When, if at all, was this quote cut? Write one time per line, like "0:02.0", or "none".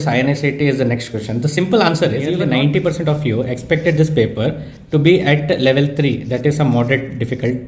0:02.5